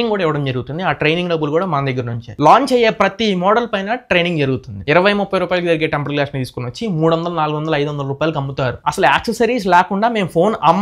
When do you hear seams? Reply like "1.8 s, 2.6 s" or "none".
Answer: 2.3 s, 4.9 s, 8.7 s